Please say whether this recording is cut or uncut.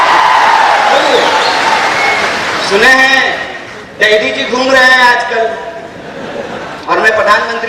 cut